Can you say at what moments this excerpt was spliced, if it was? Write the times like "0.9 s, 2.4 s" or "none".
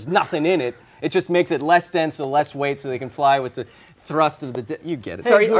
none